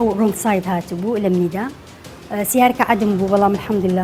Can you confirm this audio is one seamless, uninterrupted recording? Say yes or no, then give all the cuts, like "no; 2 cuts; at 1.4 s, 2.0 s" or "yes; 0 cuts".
yes; 0 cuts